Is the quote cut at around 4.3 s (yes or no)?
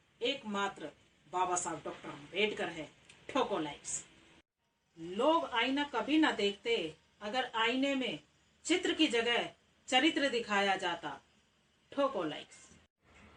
no